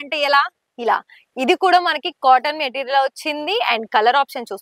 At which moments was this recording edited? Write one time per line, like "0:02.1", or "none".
none

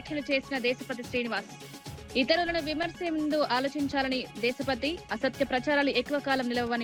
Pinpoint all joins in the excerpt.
none

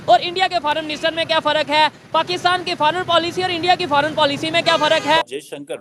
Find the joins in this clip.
none

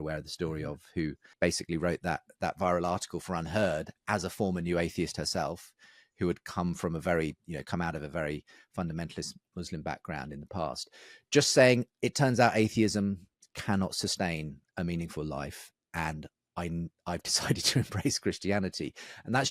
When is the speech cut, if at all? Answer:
0:01.2

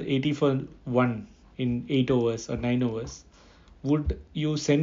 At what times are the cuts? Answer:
none

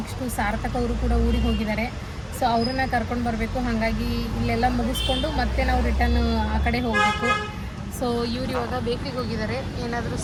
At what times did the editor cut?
none

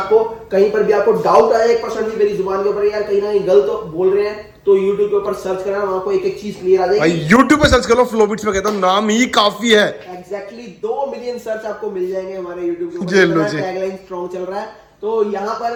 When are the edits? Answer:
none

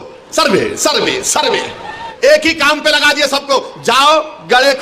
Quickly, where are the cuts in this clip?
0:02.0

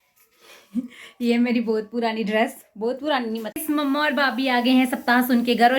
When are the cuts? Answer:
0:03.5

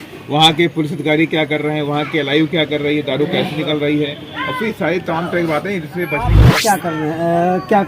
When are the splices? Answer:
0:06.5

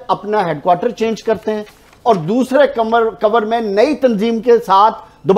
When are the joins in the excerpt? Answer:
none

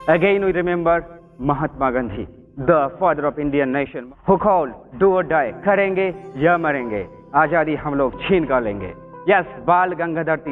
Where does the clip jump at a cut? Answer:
0:04.0
0:08.9

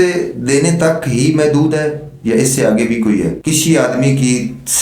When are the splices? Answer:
0:03.4

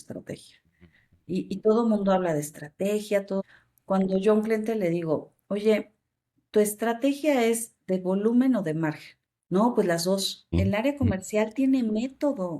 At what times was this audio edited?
0:03.4
0:10.5

